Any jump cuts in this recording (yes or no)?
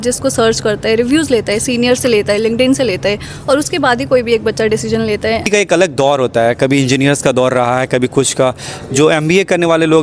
yes